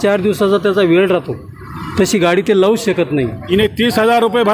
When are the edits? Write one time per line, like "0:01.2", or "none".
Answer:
0:03.4